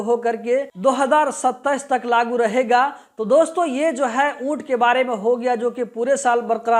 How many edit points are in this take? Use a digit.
0